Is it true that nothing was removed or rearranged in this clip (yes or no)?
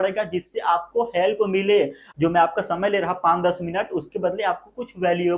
no